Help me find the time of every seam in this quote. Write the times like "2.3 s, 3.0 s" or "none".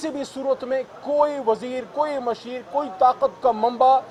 none